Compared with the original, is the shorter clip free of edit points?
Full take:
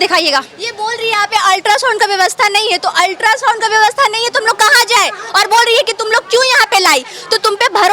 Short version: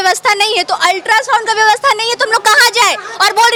yes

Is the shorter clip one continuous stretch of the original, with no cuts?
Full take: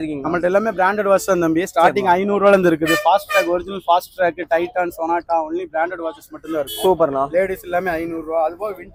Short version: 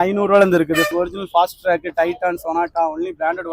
no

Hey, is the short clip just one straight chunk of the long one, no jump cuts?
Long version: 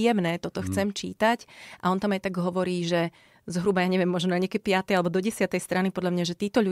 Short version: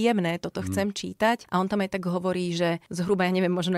no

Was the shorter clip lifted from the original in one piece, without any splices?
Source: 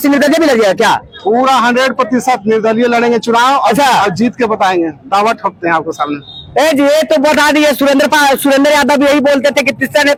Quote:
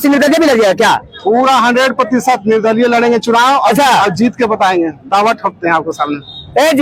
yes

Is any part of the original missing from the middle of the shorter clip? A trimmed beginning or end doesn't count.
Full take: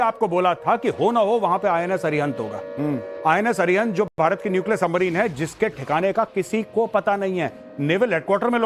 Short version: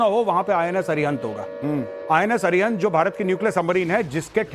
yes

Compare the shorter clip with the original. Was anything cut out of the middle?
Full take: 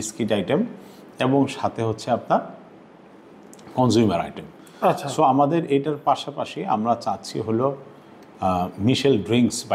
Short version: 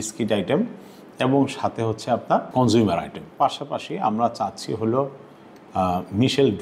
yes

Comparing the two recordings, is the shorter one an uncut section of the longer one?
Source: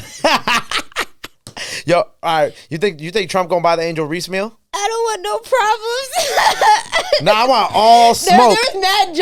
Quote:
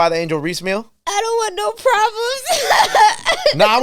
yes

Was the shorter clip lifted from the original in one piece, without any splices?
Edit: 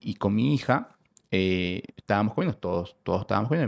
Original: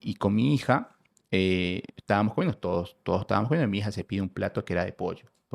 yes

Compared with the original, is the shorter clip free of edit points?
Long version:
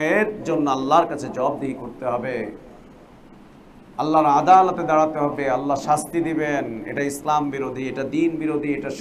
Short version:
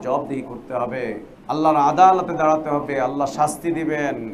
no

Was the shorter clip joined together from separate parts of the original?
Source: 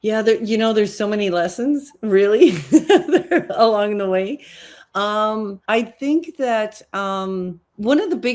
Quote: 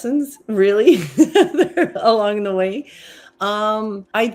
no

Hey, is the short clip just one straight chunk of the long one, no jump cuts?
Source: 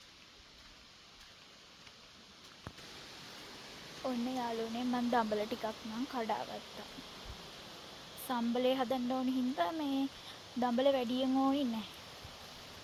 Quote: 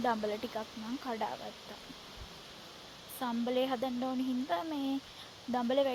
yes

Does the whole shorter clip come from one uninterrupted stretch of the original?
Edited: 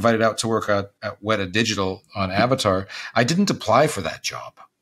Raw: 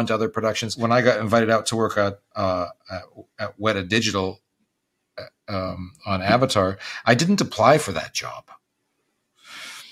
no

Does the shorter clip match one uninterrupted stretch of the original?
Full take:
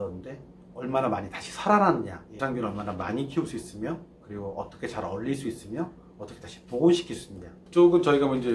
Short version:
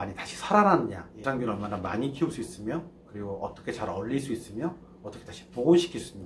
yes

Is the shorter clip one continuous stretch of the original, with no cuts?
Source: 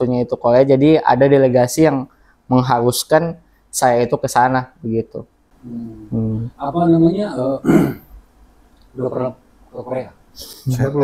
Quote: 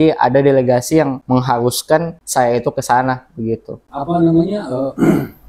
no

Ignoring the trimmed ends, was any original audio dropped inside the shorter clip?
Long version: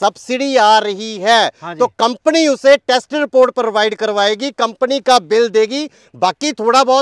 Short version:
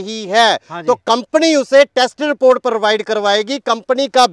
no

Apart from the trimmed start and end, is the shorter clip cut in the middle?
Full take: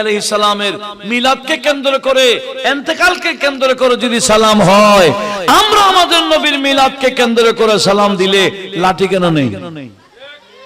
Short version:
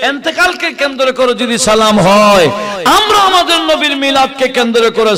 no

